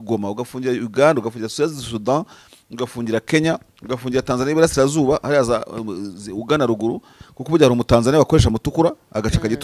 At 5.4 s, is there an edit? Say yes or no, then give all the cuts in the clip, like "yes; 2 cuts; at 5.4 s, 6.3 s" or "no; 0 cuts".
no; 0 cuts